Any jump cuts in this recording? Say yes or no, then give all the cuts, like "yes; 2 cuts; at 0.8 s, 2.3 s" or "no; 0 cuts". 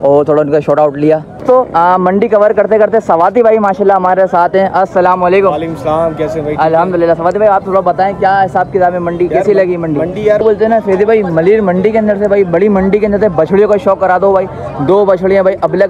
yes; 2 cuts; at 1.3 s, 10.4 s